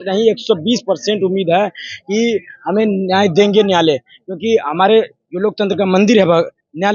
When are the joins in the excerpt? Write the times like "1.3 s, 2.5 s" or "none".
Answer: none